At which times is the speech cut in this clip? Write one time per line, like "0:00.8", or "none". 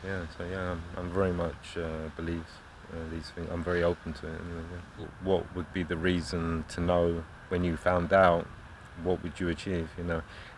0:05.0